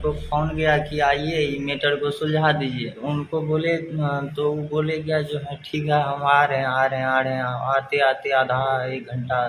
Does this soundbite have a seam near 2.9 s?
yes; 1 cut; at 2.9 s

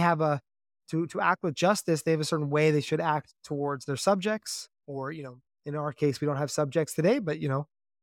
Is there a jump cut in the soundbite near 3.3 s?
yes; 1 cut; at 3.3 s

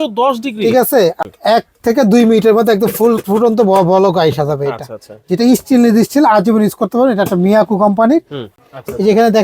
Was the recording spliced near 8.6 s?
yes; 2 cuts; at 1.2 s, 8.6 s

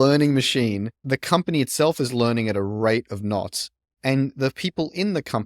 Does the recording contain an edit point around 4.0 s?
no; 1 cut; at 1.0 s

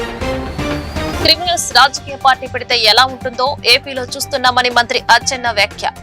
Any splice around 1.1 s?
yes; 1 cut; at 1.1 s

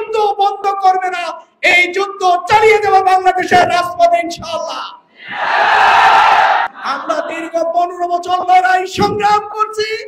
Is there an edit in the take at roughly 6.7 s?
yes; 1 cut; at 6.7 s

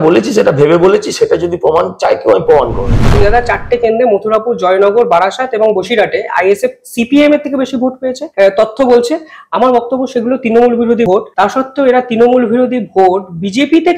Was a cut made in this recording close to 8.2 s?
yes; 3 cuts; at 3.2 s, 8.2 s, 11.1 s

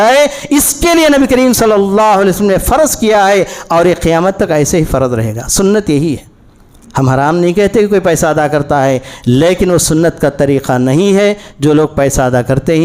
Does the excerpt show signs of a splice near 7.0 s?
no; 0 cuts

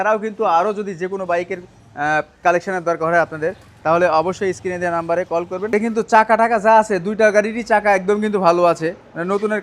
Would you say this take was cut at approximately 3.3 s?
no; 1 cut; at 5.7 s

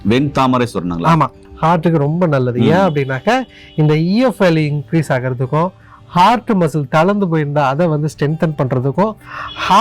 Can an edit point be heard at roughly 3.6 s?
no; 1 cut; at 1.4 s

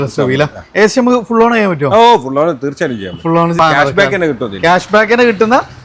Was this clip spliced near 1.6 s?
no; 1 cut; at 3.6 s

